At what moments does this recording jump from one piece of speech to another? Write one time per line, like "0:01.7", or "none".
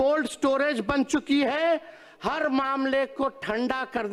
none